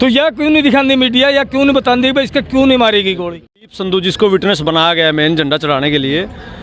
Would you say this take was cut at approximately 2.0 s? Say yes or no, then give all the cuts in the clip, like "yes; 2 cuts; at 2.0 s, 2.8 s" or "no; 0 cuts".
no; 1 cut; at 3.8 s